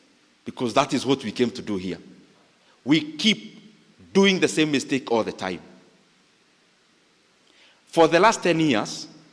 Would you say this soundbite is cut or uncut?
uncut